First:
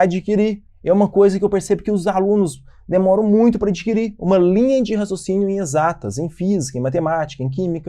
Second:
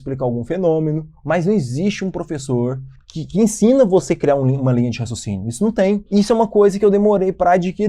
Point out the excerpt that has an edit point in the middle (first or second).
second